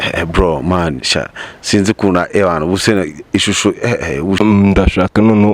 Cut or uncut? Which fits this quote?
cut